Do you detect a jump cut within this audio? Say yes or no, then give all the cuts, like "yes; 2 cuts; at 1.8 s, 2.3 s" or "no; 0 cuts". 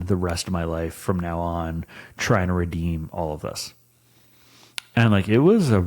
no; 0 cuts